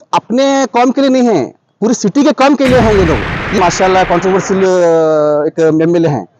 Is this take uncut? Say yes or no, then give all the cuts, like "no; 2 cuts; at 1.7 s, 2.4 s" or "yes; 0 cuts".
no; 1 cut; at 3.5 s